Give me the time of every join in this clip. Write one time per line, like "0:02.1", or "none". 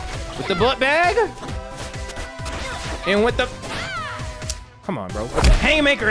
none